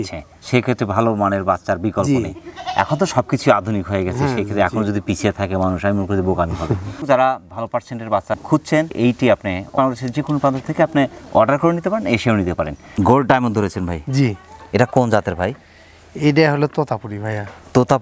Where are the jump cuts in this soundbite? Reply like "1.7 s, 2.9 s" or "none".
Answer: none